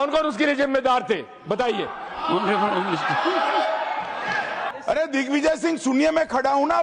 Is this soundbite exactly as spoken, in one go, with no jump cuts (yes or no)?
no